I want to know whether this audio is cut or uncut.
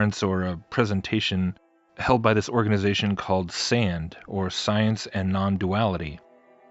cut